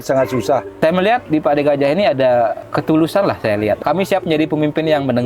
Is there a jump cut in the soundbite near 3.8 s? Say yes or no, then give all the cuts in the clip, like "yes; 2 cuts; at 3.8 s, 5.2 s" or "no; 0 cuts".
yes; 3 cuts; at 1.2 s, 2.6 s, 3.8 s